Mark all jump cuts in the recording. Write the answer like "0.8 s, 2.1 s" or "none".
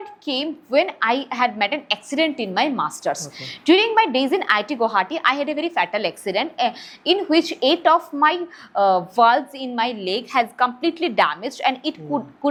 none